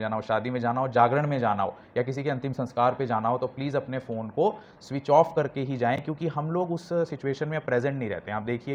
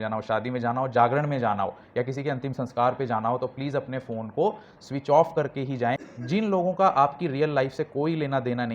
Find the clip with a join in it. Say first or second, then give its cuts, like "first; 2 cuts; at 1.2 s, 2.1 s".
second; 1 cut; at 6.1 s